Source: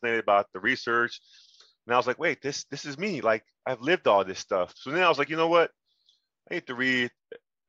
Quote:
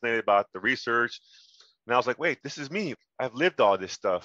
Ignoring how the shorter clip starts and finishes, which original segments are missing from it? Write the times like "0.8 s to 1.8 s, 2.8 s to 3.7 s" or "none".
3.0 s to 3.4 s